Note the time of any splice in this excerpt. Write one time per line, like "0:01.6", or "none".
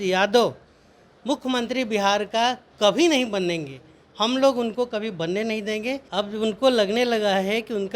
0:06.0